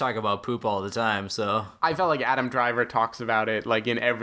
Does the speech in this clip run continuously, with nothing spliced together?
yes; 0 cuts

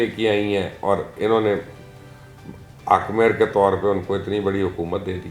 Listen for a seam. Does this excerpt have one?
no; 0 cuts

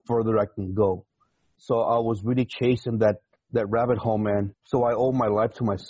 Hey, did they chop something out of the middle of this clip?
yes; 2 cuts; at 3.3 s, 4.6 s

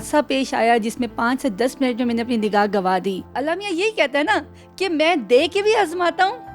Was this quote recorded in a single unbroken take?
no; 1 cut; at 3.3 s

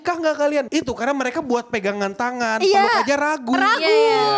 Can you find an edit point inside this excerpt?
no; 0 cuts

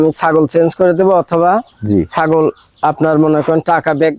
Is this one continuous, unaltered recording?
yes; 0 cuts

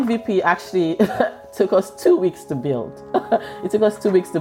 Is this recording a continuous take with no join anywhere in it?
yes; 0 cuts

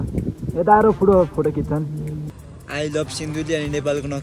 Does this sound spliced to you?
yes; 1 cut; at 2.3 s

